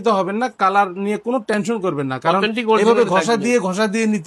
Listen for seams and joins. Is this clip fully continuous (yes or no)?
yes